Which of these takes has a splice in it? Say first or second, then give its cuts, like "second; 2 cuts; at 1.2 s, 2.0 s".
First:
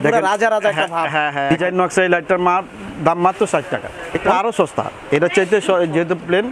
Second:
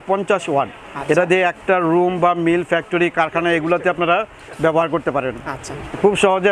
first; 2 cuts; at 1.6 s, 4.3 s